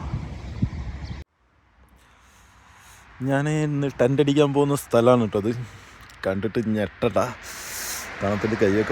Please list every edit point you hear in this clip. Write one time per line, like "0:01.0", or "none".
0:01.2